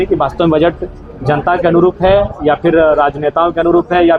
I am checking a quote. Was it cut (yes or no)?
no